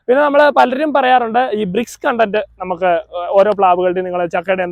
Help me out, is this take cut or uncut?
uncut